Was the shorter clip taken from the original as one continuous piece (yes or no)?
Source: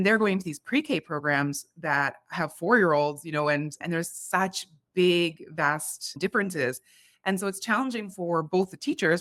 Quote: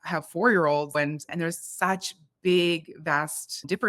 no